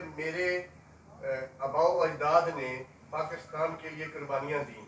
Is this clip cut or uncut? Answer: uncut